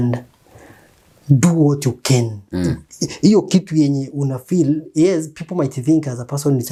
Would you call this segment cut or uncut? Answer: uncut